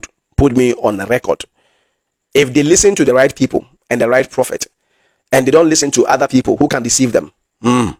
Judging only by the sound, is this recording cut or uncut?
uncut